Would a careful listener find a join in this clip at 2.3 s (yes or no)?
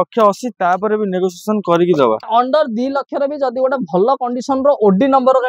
yes